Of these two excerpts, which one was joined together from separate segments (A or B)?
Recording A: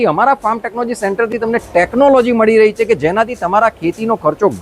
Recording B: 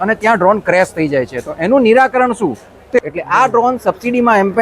B